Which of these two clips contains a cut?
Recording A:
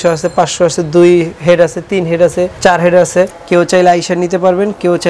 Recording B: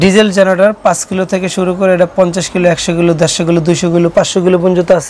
A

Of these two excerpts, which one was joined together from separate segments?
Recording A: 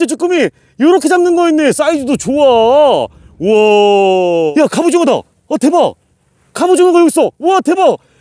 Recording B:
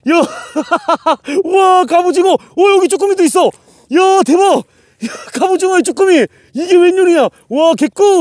A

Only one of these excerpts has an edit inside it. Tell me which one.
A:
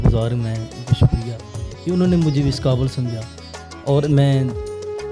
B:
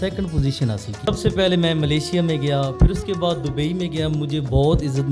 B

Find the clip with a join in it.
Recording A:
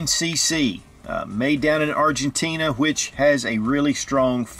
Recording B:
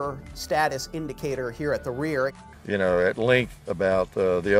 B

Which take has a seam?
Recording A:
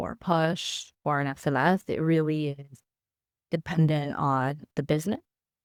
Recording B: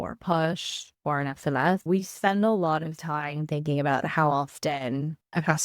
B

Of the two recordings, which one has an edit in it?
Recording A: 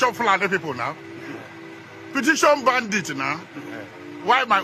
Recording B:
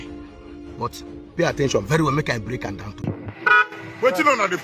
B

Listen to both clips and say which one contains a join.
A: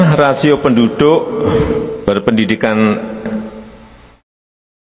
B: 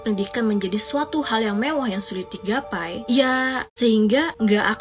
B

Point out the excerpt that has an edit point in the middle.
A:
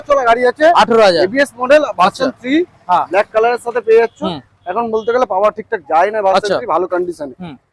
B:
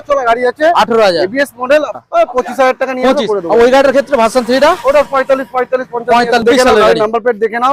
B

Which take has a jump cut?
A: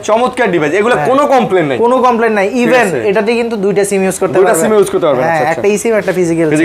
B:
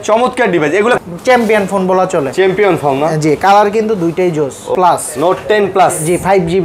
B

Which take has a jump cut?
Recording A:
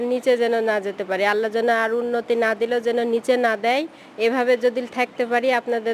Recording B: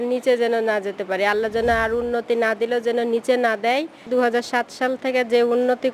B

